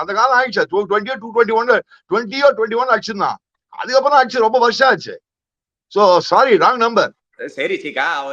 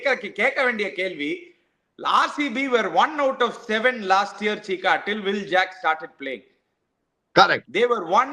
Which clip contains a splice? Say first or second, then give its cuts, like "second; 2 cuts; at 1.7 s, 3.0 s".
first; 1 cut; at 7.3 s